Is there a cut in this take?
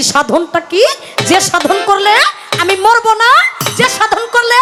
no; 0 cuts

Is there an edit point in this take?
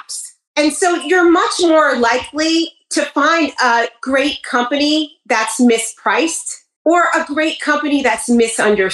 no; 0 cuts

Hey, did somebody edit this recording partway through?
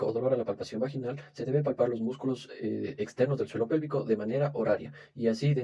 no; 0 cuts

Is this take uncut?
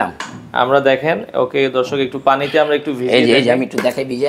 yes; 0 cuts

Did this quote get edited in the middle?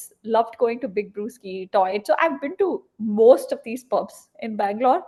no; 0 cuts

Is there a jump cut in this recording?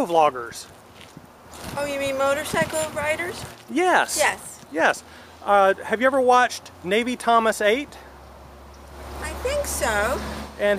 no; 0 cuts

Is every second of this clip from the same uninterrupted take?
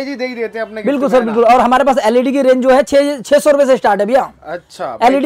yes; 0 cuts

